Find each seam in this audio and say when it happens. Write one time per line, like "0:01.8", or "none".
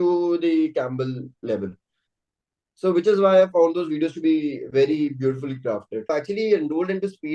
0:06.1